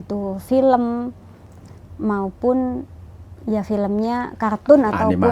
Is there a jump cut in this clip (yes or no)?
no